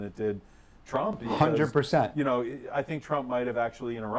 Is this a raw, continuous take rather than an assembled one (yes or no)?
yes